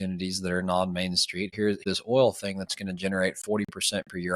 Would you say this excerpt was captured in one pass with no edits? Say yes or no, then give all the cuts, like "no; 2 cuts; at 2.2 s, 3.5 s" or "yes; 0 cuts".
no; 1 cut; at 1.8 s